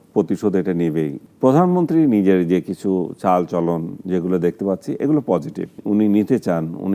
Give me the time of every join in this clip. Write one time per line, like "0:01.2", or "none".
0:01.2
0:05.8